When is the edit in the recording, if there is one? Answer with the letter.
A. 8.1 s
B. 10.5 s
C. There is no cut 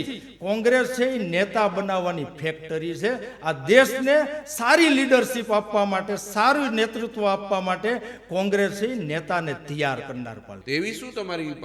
B